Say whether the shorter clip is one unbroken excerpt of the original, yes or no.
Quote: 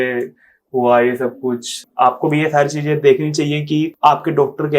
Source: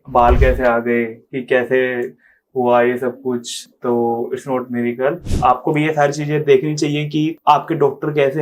no